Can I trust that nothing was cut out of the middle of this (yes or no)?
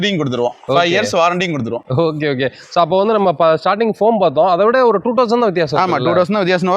yes